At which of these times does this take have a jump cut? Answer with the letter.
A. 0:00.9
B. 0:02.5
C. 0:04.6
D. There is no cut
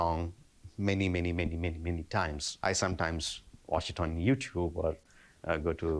B